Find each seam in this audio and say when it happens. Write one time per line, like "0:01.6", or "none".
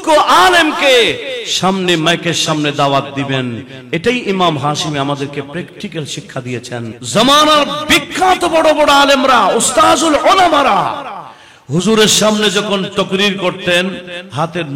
0:07.0